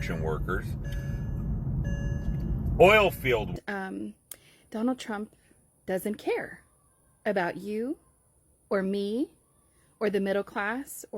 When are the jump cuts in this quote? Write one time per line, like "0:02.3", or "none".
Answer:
0:03.5